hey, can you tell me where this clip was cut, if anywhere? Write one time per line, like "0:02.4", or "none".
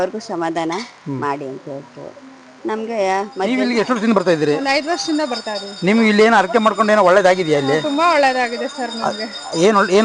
0:03.6